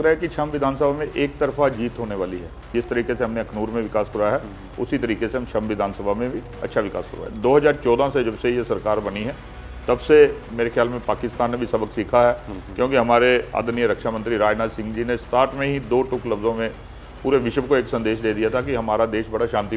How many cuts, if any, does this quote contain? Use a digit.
2